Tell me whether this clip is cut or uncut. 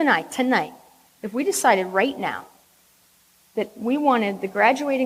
uncut